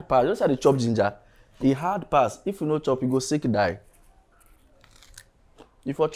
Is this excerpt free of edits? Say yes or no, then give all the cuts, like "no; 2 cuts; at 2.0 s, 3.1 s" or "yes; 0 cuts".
yes; 0 cuts